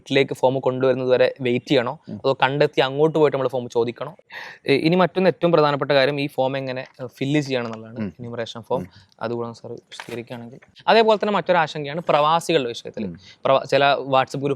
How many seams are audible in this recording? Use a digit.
2